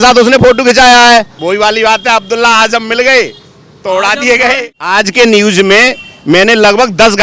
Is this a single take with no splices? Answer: no; 2 cuts; at 1.4 s, 4.7 s

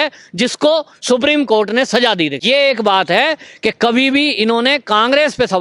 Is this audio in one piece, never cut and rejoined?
no; 1 cut; at 2.4 s

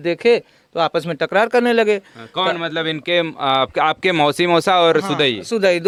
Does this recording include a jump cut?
no; 0 cuts

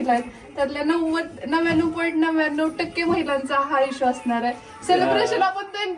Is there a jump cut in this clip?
no; 0 cuts

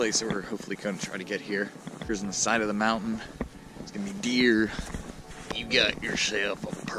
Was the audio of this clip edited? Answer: yes; 2 cuts; at 2.1 s, 5.3 s

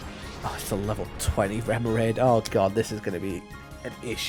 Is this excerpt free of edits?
yes; 0 cuts

